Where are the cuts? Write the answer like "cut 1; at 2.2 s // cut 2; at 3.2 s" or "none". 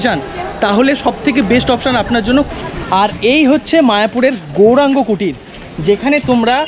cut 1; at 2.5 s